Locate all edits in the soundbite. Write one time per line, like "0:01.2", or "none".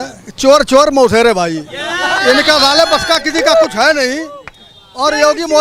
none